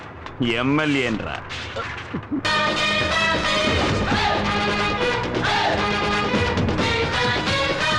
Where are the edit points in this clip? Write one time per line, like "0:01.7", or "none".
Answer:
none